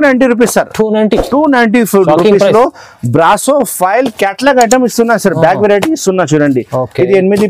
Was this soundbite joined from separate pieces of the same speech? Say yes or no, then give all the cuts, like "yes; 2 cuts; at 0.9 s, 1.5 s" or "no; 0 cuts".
no; 0 cuts